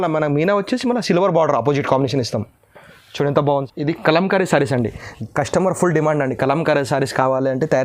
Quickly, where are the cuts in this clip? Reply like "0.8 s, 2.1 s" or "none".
3.7 s